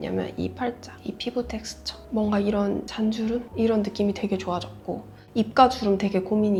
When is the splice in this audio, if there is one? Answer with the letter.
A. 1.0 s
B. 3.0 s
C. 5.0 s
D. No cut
D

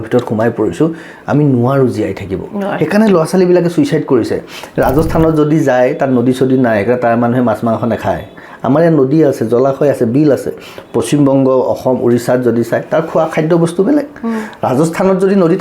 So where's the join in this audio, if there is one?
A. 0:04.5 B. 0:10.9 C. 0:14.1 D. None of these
A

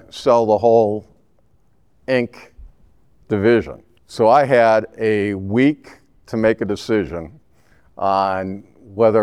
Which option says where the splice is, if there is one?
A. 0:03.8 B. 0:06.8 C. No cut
A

